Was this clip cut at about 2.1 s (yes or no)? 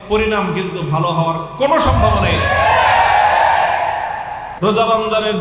no